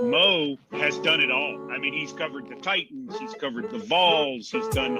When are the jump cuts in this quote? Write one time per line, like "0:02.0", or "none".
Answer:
none